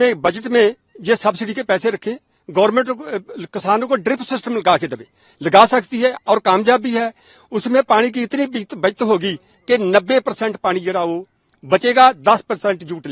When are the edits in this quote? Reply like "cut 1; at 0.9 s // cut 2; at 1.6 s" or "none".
none